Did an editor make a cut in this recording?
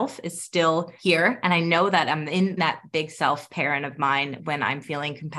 yes; 2 cuts; at 0.9 s, 2.6 s

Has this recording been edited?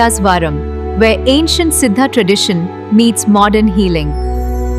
no; 0 cuts

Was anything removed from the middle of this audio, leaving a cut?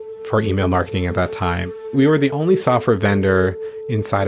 yes; 1 cut; at 1.7 s

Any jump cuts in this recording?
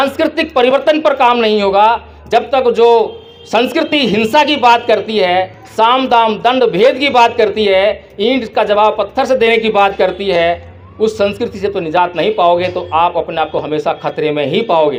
no; 0 cuts

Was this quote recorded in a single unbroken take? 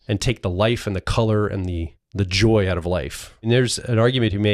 no; 2 cuts; at 2.0 s, 3.5 s

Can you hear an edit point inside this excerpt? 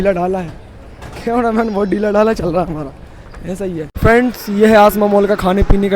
yes; 1 cut; at 3.9 s

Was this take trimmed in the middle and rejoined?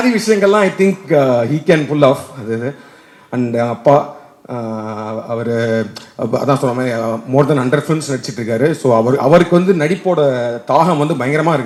no; 0 cuts

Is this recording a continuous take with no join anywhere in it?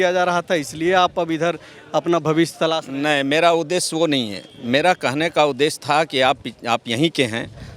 yes; 0 cuts

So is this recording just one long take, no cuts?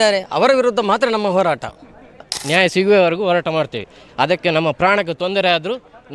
no; 1 cut; at 2.3 s

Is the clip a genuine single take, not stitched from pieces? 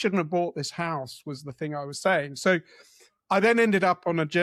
yes; 0 cuts

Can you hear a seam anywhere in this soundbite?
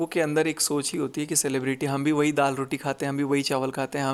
no; 0 cuts

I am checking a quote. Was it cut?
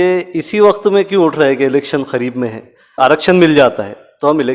yes; 1 cut; at 3.0 s

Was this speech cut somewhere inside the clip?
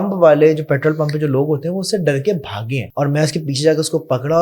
yes; 1 cut; at 2.9 s

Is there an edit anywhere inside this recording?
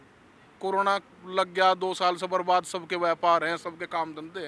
no; 0 cuts

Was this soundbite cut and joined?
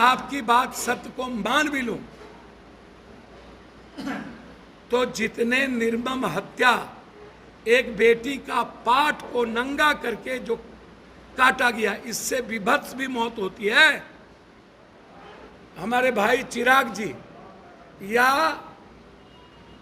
yes; 1 cut; at 15.5 s

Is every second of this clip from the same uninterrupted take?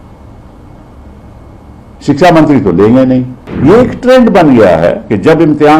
no; 1 cut; at 3.4 s

